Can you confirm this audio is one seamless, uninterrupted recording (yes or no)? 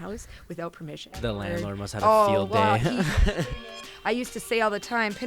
no